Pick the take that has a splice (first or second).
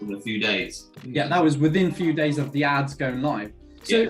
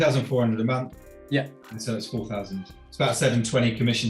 second